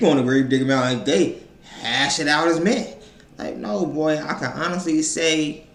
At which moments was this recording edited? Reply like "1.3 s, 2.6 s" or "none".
none